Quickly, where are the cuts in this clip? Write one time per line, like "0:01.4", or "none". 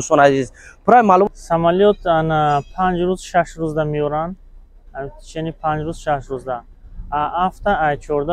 0:01.3